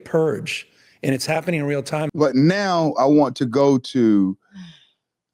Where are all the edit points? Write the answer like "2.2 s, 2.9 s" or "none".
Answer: 2.1 s

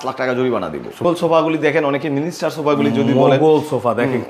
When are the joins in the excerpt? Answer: 1.0 s

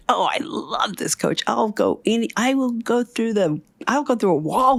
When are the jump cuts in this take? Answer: none

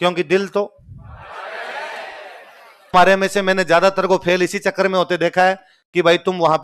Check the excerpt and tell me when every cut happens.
2.9 s

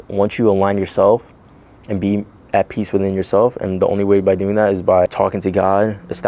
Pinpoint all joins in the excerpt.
none

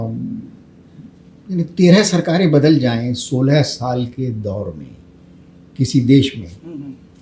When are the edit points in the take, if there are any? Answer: none

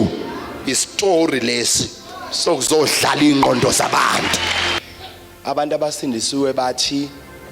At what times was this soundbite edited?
4.8 s

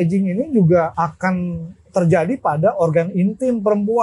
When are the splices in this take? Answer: 0.9 s

